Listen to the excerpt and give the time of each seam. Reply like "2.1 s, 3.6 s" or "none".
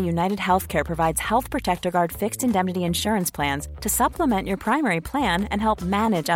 none